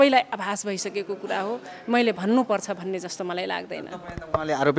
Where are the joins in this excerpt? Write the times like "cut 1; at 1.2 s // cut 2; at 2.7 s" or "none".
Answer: none